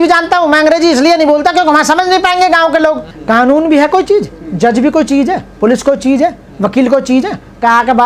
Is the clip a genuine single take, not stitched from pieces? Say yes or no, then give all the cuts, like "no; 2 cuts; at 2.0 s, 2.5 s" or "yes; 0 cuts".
no; 1 cut; at 3.1 s